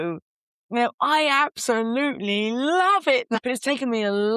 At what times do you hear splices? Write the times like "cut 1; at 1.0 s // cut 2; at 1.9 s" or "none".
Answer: cut 1; at 3.4 s